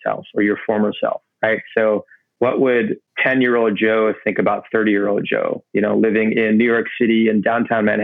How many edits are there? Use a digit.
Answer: 2